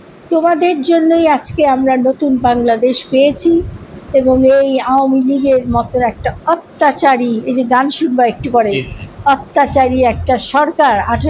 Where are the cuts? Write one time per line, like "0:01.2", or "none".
none